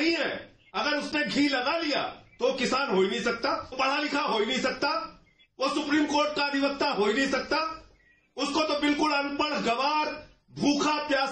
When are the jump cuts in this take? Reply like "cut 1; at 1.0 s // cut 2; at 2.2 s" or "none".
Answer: cut 1; at 3.7 s